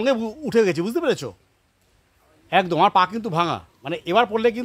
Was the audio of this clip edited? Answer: no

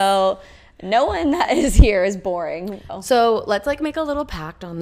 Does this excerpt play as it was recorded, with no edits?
no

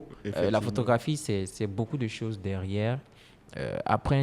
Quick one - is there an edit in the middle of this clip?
no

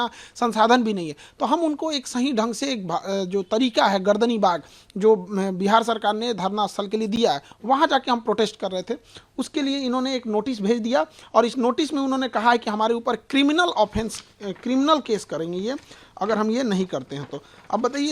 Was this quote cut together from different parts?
no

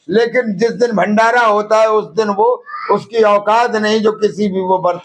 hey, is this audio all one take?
yes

